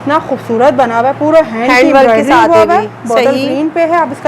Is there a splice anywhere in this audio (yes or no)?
no